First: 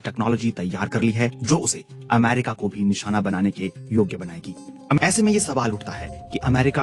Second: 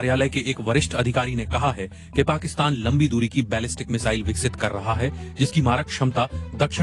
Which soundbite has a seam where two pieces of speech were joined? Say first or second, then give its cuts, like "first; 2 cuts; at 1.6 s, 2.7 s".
first; 1 cut; at 5.0 s